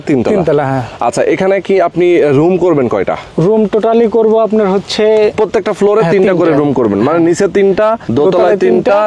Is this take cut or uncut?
cut